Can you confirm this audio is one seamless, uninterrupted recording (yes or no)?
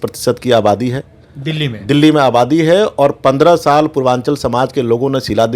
yes